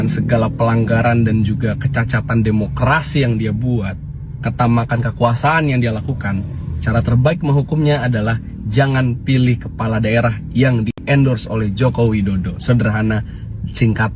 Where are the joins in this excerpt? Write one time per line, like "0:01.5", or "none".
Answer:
none